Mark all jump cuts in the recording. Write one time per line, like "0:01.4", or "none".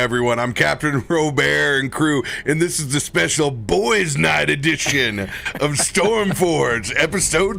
none